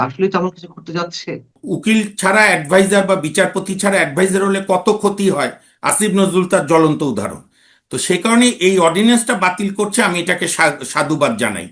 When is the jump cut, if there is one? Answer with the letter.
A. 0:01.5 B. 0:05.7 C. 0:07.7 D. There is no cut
A